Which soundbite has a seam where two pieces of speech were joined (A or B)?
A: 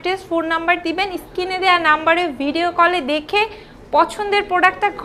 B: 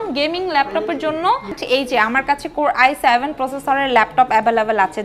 B